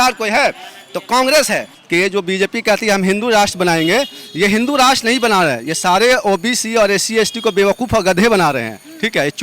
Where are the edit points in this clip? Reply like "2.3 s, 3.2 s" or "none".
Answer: 1.7 s